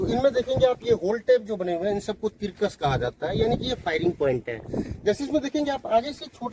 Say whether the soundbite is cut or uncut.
uncut